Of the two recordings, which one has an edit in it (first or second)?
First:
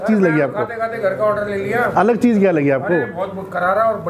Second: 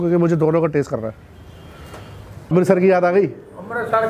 second